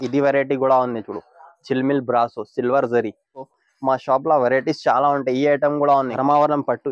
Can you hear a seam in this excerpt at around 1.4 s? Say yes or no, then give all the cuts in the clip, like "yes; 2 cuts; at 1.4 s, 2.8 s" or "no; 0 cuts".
no; 2 cuts; at 3.5 s, 6.1 s